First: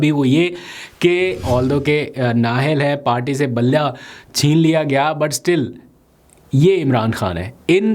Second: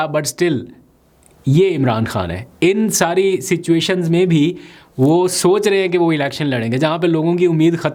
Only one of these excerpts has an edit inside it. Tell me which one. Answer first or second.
first